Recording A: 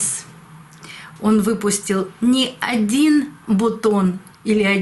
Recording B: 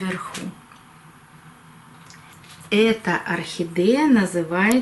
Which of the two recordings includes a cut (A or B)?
B